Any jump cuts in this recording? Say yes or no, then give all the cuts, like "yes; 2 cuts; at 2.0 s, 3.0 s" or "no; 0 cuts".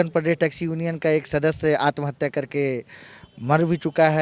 no; 0 cuts